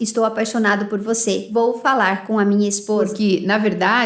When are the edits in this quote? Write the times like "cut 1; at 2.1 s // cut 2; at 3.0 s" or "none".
cut 1; at 3.1 s